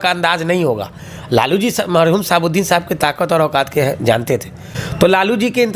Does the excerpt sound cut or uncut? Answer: uncut